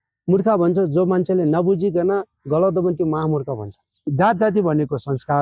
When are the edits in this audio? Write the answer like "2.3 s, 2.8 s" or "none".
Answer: 4.1 s